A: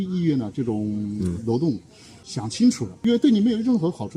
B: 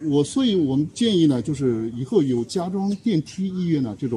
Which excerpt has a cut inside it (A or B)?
A